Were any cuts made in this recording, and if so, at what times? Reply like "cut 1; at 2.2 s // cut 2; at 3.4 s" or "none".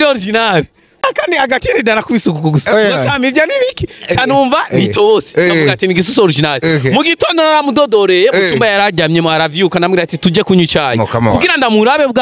cut 1; at 1.1 s